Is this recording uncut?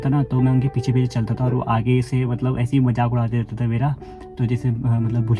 yes; 0 cuts

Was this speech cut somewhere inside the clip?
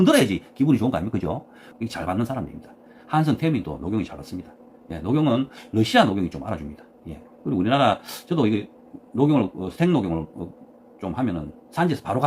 yes; 1 cut; at 1.6 s

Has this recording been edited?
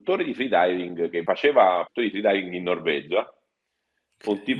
yes; 2 cuts; at 1.2 s, 1.9 s

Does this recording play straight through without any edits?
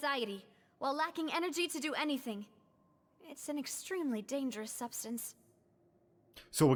yes; 0 cuts

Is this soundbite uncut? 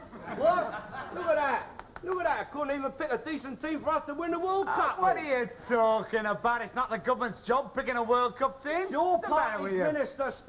yes; 0 cuts

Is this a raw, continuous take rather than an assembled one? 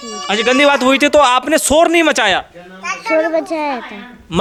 yes; 0 cuts

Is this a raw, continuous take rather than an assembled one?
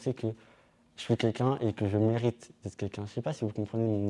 yes; 0 cuts

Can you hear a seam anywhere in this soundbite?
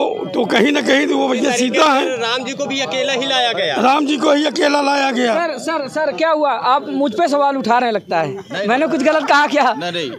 no; 0 cuts

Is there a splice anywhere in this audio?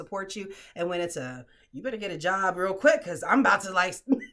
no; 0 cuts

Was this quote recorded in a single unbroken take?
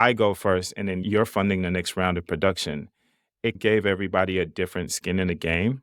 yes; 0 cuts

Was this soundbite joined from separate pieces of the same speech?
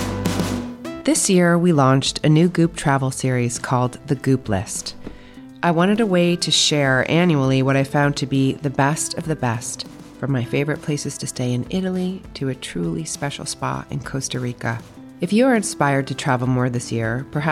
yes; 1 cut; at 1.0 s

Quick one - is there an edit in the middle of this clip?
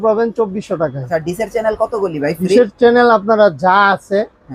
yes; 1 cut; at 1.0 s

